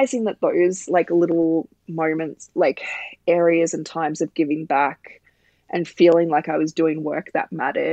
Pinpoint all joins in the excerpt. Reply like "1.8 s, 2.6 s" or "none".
none